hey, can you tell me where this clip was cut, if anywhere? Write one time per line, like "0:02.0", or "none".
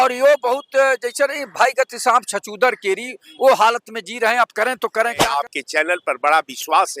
0:05.2